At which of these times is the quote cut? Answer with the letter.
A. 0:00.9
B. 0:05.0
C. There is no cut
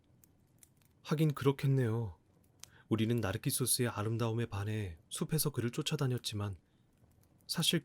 A